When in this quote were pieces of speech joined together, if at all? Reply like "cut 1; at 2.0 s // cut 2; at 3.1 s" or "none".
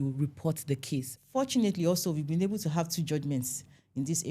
cut 1; at 1.1 s